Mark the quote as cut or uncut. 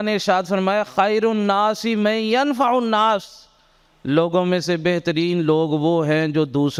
uncut